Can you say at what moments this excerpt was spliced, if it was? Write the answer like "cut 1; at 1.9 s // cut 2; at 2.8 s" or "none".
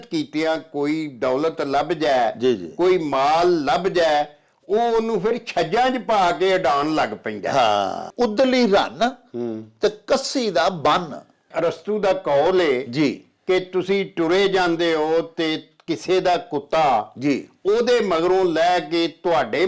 cut 1; at 8.1 s // cut 2; at 11.5 s